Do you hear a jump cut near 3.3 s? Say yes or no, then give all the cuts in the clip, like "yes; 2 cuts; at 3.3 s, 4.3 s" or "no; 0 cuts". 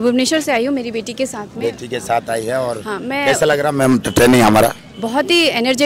no; 0 cuts